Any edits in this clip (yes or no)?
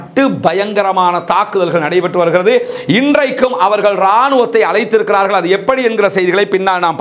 no